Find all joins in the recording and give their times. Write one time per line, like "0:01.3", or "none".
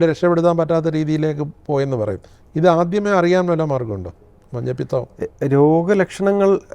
none